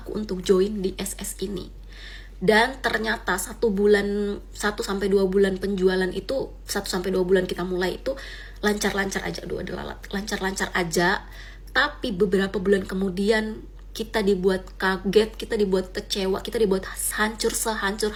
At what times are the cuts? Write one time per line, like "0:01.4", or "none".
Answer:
none